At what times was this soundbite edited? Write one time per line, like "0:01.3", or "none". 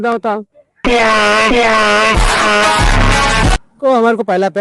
0:03.6